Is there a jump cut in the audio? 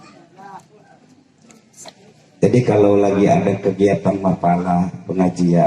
no; 0 cuts

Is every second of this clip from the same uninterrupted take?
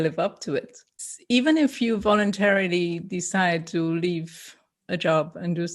no; 1 cut; at 1.0 s

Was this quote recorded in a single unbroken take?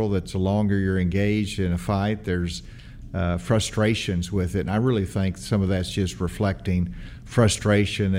yes; 0 cuts

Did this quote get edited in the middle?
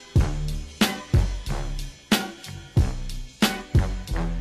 no; 0 cuts

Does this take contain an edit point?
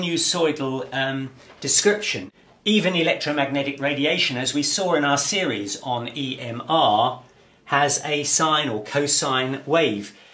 no; 0 cuts

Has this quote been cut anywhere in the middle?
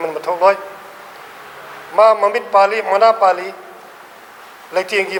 no; 0 cuts

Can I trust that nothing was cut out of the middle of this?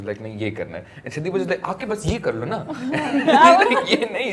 yes; 0 cuts

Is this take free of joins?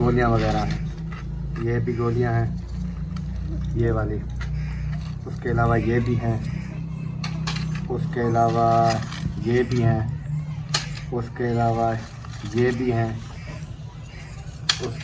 yes; 0 cuts

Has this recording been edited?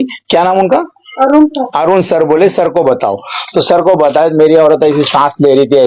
no; 0 cuts

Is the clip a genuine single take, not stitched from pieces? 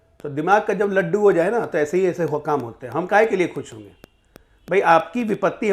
yes; 0 cuts

